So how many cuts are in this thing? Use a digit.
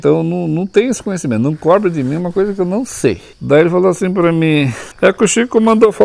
2